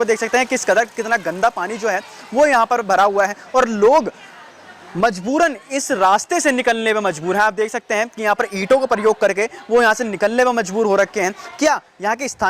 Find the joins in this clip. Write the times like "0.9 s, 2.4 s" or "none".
none